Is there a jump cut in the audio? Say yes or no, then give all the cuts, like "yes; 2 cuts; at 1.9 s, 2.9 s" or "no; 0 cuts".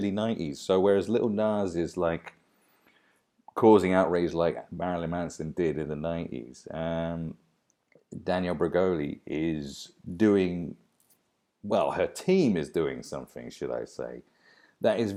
no; 0 cuts